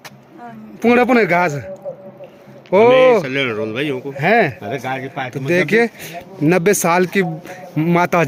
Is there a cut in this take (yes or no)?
no